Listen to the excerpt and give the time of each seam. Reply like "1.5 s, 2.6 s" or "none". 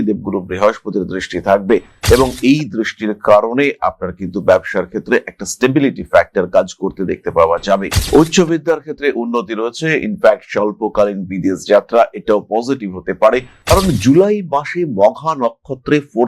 8.0 s, 13.6 s